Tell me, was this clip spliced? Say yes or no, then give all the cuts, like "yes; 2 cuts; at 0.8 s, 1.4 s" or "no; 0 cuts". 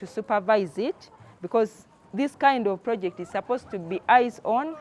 no; 0 cuts